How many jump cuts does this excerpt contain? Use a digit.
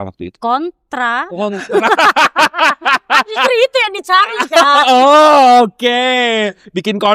0